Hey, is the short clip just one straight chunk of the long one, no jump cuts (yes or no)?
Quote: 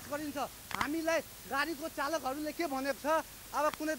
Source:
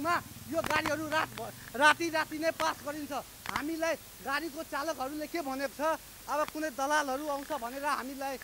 yes